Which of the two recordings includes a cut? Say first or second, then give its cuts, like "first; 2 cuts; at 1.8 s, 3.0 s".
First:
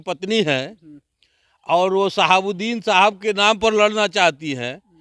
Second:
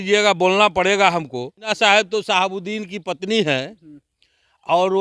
second; 1 cut; at 1.7 s